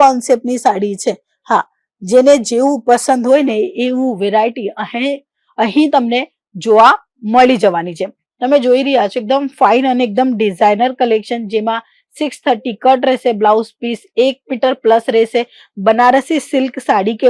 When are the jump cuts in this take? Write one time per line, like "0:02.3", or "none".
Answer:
none